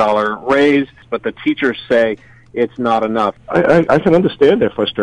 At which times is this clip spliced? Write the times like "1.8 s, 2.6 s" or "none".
1.1 s, 3.3 s